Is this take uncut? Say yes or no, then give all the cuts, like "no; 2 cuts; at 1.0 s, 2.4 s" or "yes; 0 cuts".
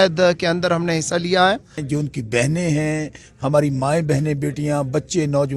no; 1 cut; at 1.8 s